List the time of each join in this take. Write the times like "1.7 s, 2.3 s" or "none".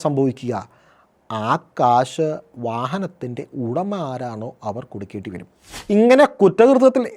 5.7 s